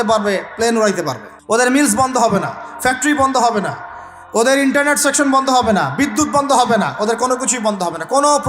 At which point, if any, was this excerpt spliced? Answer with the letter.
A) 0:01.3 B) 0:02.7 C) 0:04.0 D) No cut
A